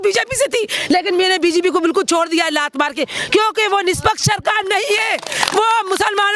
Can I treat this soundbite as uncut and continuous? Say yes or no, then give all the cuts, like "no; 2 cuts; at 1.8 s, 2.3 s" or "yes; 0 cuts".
yes; 0 cuts